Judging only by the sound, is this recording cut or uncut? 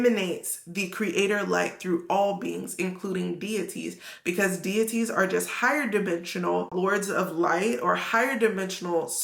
cut